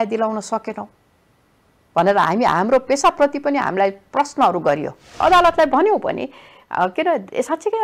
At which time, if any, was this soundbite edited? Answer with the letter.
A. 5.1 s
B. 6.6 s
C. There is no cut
A